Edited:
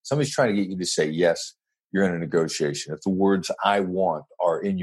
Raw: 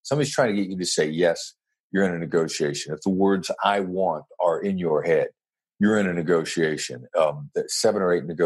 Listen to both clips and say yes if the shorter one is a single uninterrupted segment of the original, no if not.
yes